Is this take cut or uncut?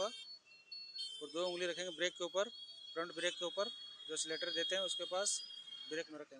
uncut